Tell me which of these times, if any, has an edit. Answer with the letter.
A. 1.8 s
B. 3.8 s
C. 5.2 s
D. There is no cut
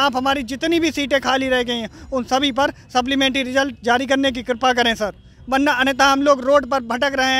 D